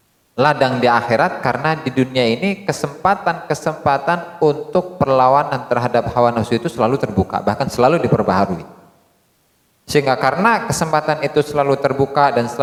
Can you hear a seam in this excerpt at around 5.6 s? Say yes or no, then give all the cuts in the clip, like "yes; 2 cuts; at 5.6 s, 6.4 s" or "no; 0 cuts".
no; 0 cuts